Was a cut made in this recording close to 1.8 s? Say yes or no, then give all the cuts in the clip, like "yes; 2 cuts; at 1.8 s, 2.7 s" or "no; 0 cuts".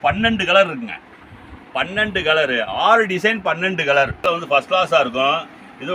no; 1 cut; at 4.3 s